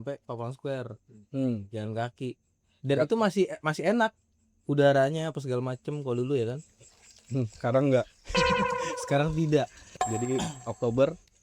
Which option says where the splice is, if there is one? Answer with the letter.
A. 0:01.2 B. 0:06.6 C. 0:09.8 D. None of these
C